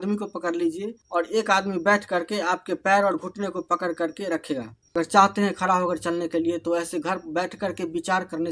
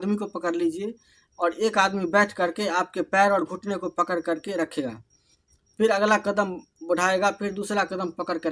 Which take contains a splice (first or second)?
first